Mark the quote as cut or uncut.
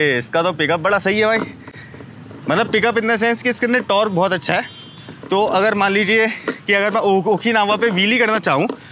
uncut